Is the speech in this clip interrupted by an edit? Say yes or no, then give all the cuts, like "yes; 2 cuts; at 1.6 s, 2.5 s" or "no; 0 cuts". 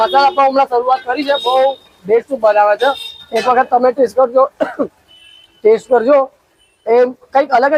no; 0 cuts